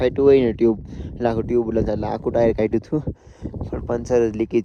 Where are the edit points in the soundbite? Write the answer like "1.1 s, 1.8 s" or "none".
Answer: none